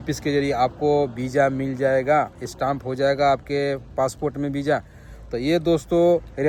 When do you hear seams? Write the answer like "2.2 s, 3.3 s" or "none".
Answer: none